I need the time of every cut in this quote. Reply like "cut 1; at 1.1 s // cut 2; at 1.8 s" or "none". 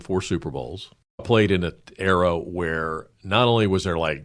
cut 1; at 1.2 s